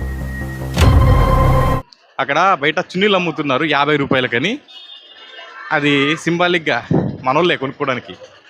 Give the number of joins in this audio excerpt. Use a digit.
1